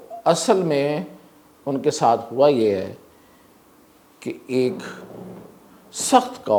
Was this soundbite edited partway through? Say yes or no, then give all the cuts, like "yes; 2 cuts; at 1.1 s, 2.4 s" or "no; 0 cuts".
no; 0 cuts